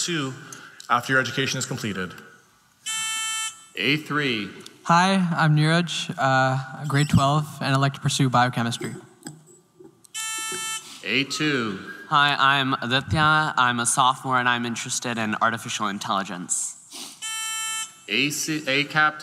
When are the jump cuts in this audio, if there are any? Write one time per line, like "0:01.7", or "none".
0:06.7